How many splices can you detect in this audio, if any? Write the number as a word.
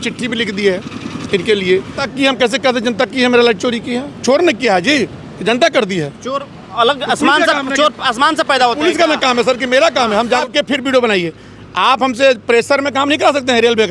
two